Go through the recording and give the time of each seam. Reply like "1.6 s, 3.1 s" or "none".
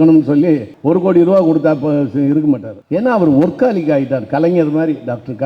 2.7 s